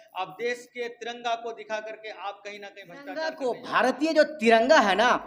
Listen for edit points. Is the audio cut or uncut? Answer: cut